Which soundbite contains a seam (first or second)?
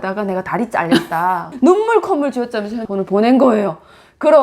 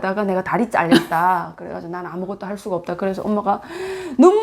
first